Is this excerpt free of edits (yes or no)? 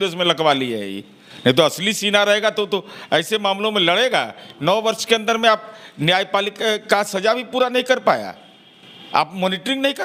yes